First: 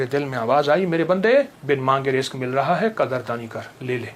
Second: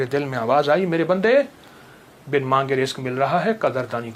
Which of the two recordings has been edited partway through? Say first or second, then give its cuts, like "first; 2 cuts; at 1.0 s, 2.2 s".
first; 1 cut; at 1.6 s